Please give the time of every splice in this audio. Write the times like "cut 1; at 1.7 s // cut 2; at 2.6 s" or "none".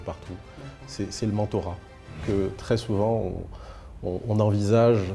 cut 1; at 2.2 s